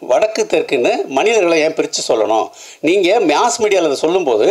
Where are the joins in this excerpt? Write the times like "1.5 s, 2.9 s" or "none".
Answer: none